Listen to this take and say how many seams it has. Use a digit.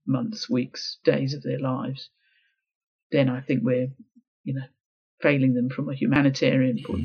1